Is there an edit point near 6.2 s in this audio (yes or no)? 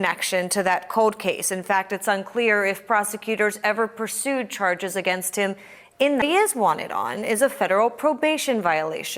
yes